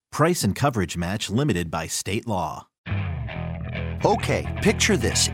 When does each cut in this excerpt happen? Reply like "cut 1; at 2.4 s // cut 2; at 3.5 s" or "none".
cut 1; at 2.7 s